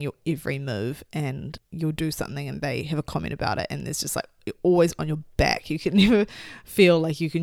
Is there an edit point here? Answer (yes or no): yes